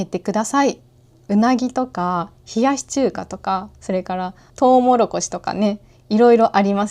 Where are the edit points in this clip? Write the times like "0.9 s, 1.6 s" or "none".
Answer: 1.2 s, 4.4 s

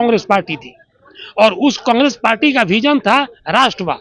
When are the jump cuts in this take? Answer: none

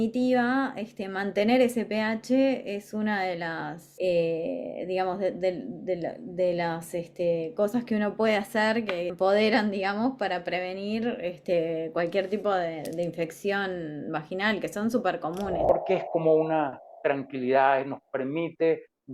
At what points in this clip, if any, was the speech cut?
3.8 s, 9.1 s, 15.6 s

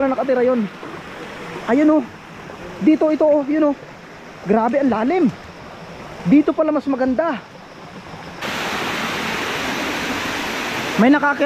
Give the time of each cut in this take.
8.4 s

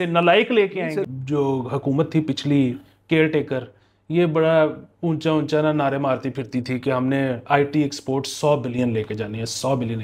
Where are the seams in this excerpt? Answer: 1.1 s

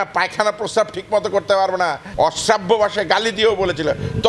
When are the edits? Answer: 2.0 s

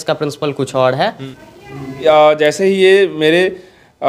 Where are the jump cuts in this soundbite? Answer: 1.6 s

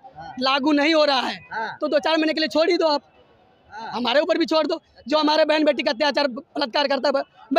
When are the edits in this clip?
none

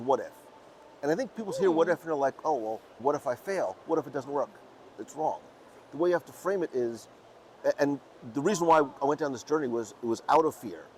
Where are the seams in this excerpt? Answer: none

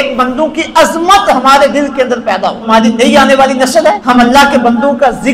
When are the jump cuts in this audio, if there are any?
2.7 s, 4.0 s

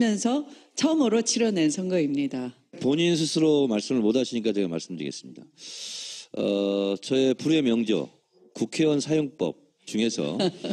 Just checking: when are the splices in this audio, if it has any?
4.4 s

